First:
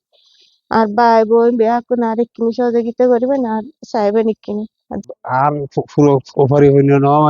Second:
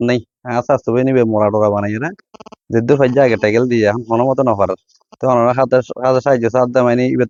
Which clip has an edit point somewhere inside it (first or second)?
first